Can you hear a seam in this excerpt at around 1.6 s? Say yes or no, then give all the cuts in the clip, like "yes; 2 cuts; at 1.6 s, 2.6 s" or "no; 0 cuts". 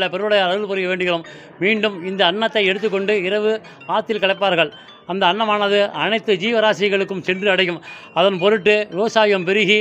no; 0 cuts